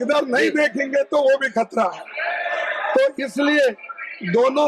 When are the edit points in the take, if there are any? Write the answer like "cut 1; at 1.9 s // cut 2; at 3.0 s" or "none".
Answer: none